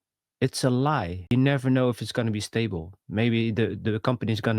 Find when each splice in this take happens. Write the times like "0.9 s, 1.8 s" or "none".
1.3 s